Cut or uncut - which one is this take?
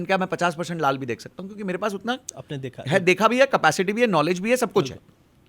uncut